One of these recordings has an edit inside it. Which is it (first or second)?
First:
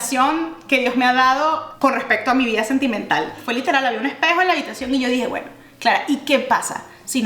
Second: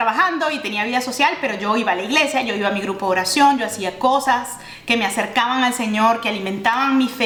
first